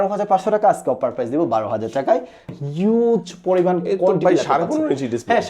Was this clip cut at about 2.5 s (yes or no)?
yes